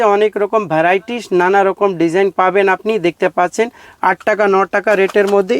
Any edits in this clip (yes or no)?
no